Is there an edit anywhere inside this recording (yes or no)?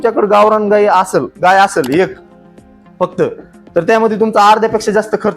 no